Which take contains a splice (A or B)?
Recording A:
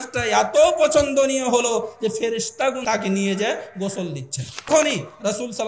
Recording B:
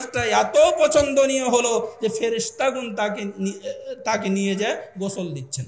A